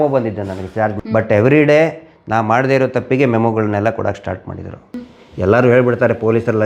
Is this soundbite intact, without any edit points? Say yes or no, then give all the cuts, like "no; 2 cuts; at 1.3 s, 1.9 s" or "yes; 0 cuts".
no; 2 cuts; at 1.0 s, 4.7 s